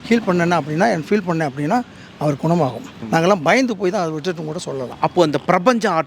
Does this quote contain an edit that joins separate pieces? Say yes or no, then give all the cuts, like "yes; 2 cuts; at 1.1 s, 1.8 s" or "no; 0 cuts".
yes; 2 cuts; at 2.9 s, 4.9 s